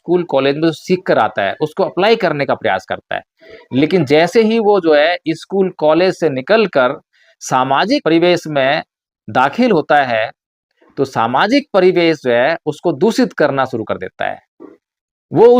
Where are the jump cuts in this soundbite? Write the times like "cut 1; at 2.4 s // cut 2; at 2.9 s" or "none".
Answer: cut 1; at 8.0 s

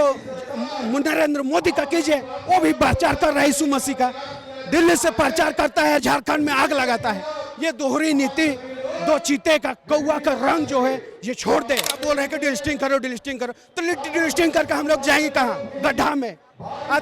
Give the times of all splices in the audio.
cut 1; at 11.9 s

